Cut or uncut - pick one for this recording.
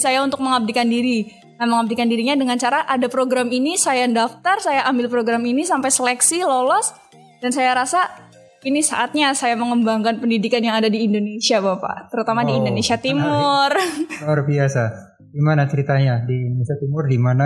uncut